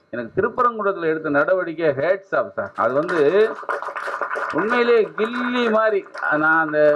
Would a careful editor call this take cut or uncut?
uncut